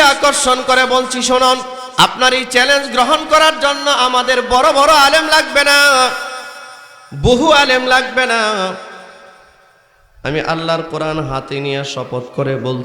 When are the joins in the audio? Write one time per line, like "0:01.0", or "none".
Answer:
0:01.8